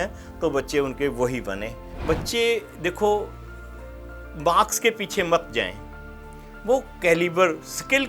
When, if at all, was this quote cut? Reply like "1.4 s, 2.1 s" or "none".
2.0 s